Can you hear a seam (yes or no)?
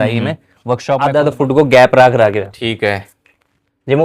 yes